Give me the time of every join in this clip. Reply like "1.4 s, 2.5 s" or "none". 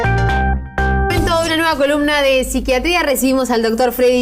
1.1 s